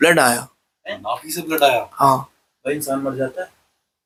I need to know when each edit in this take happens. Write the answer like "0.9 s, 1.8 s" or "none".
none